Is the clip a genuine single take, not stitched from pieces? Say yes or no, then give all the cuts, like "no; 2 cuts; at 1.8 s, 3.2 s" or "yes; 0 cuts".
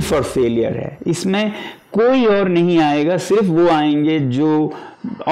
yes; 0 cuts